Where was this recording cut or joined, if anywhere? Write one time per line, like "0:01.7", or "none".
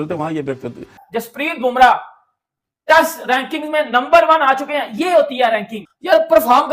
0:01.0